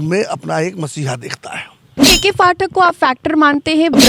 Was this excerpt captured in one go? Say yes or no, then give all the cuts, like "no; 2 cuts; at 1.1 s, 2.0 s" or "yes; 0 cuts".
no; 1 cut; at 2.0 s